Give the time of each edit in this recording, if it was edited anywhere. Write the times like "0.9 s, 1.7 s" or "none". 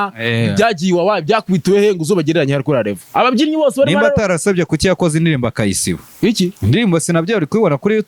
3.0 s